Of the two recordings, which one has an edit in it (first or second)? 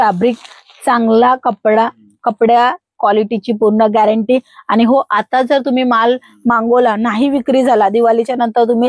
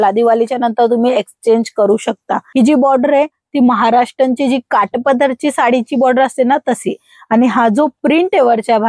second